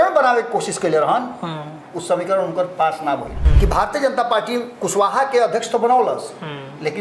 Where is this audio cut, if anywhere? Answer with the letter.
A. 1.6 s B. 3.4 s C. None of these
B